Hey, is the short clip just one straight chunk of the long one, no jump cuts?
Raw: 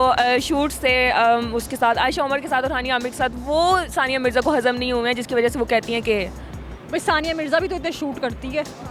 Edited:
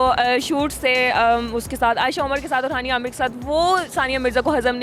yes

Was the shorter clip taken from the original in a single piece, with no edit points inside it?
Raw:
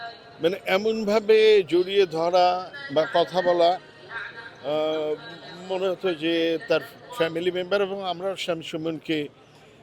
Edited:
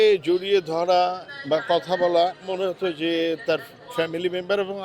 no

